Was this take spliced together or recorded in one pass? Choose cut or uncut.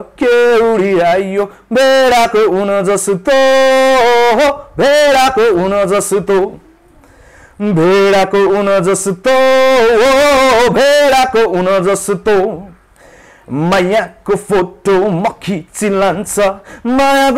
uncut